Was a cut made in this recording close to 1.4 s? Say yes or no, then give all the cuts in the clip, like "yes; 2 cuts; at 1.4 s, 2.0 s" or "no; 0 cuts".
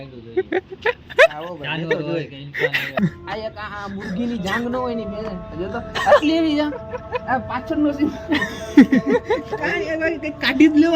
no; 1 cut; at 3.0 s